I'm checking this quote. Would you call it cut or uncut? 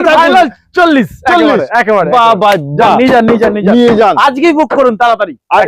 uncut